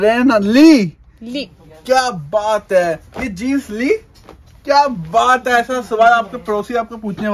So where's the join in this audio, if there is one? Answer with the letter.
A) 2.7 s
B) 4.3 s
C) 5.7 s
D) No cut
D